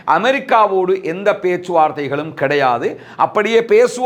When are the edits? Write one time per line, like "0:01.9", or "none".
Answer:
none